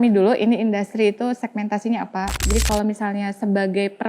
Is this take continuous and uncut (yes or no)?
no